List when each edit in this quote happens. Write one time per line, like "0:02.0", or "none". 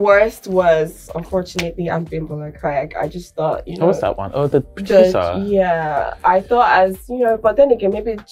none

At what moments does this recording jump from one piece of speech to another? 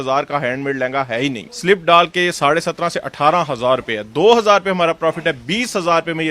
0:01.5

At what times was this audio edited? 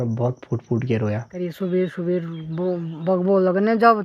0:01.3

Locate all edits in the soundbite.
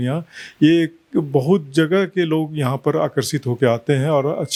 none

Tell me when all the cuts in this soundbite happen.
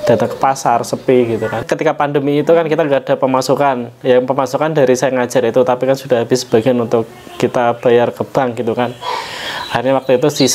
0:01.6

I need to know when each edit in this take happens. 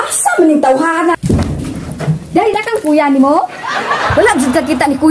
0:01.1
0:02.5

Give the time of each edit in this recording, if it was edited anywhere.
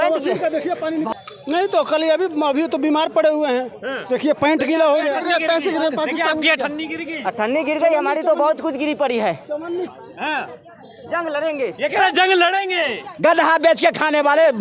0:01.1
0:09.9

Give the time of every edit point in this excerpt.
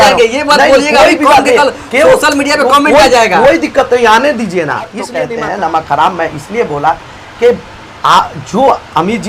0:05.1

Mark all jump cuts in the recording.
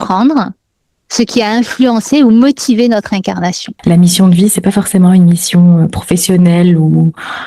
0:03.7

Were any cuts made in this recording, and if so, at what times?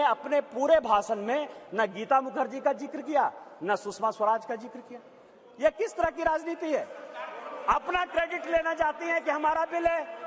none

